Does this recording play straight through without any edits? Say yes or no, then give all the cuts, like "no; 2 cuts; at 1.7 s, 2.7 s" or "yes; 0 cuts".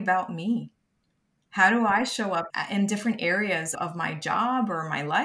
no; 2 cuts; at 2.5 s, 3.7 s